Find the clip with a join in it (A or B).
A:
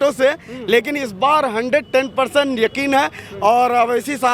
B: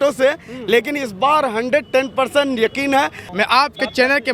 B